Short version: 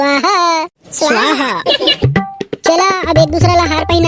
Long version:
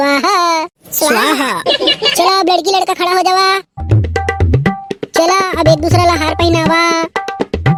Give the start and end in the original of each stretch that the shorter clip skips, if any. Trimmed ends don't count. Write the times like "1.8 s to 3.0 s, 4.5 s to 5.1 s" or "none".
2.0 s to 4.5 s